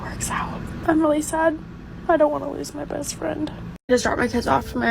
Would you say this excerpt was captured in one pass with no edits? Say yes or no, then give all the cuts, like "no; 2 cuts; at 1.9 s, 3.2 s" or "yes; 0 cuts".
no; 1 cut; at 3.7 s